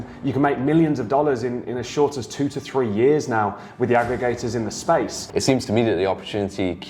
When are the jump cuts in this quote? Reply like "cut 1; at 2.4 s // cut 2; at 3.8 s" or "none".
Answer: cut 1; at 5.2 s